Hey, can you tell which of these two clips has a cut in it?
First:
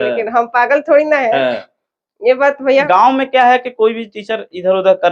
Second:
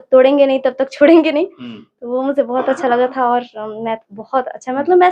first; 1 cut; at 2.8 s

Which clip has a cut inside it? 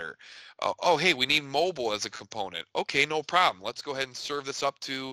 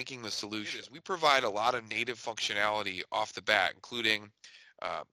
second; 1 cut; at 0.9 s

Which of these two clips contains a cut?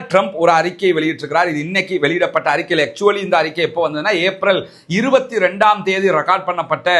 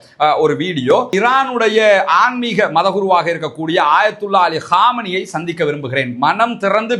second; 1 cut; at 1.1 s

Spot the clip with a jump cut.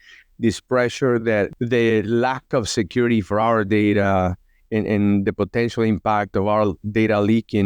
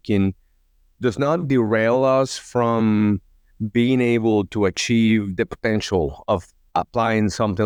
first; 1 cut; at 1.5 s

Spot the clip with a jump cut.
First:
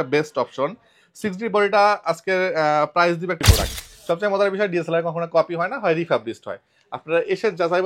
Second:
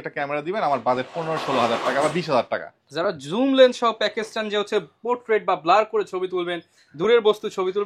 first; 1 cut; at 3.4 s

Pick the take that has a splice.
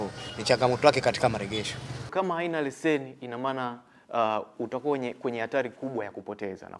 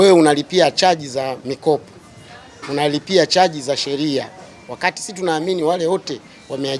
first; 1 cut; at 2.1 s

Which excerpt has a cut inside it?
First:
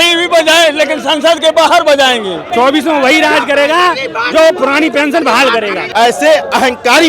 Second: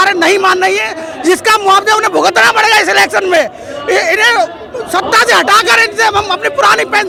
first; 2 cuts; at 2.4 s, 5.8 s

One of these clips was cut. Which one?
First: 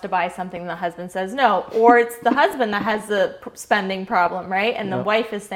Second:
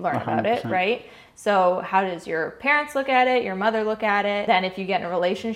second; 1 cut; at 4.4 s

